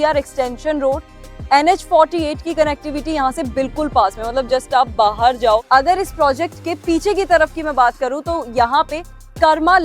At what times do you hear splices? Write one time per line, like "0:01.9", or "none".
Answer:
0:05.6